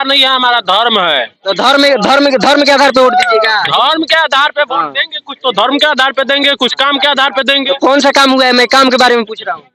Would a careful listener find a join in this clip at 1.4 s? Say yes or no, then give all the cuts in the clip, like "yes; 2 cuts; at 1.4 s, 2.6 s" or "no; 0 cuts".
no; 0 cuts